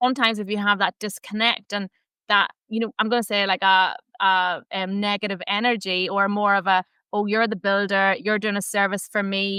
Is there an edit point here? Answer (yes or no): no